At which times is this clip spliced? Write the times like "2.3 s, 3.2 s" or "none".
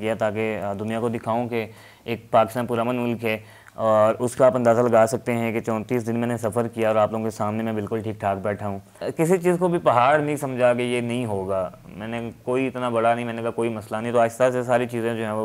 9.0 s